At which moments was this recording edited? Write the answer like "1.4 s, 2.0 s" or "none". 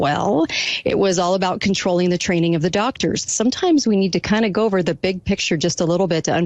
3.3 s

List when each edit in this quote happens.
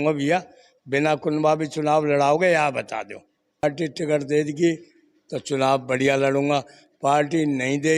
3.6 s

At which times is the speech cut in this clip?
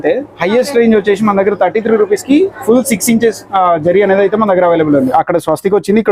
5.1 s

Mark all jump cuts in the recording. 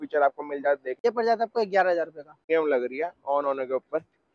1.0 s, 2.4 s

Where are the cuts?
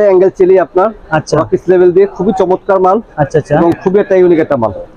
none

